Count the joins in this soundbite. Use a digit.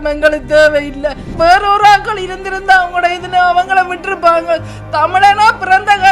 1